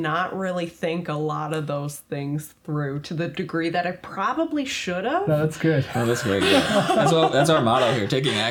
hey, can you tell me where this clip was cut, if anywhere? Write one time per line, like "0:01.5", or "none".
none